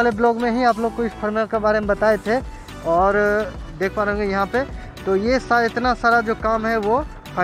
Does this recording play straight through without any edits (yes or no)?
yes